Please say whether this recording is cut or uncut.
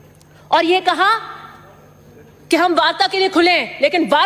uncut